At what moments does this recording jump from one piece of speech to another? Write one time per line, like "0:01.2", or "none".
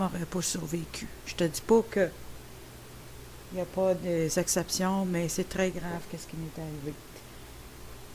0:01.6